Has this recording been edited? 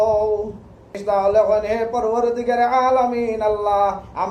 yes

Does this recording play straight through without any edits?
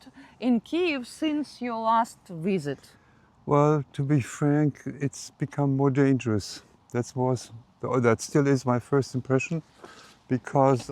yes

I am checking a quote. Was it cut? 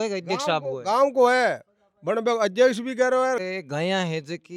yes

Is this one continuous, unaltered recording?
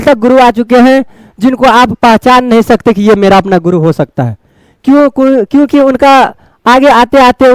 yes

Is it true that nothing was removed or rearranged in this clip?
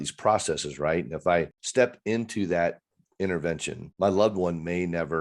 no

